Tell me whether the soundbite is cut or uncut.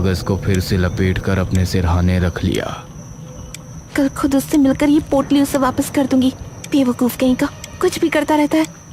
uncut